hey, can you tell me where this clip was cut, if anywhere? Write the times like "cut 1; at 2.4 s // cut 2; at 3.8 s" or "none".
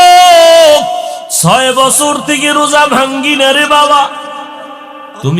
cut 1; at 1.2 s